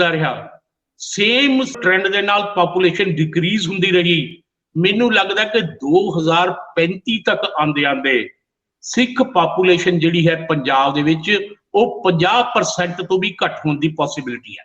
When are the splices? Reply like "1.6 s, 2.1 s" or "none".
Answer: 1.8 s